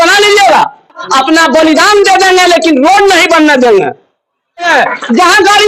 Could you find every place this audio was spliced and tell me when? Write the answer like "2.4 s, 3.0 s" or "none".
1.0 s, 4.2 s